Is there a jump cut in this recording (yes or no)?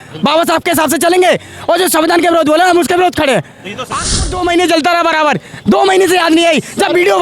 yes